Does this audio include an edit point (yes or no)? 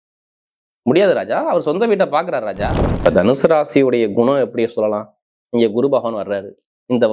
yes